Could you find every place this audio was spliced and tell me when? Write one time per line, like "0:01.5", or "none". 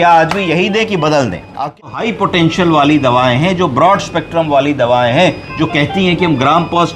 0:01.6